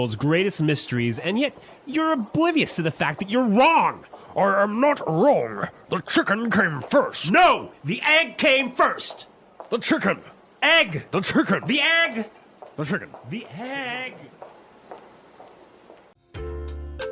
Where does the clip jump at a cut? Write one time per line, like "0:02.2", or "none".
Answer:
0:16.2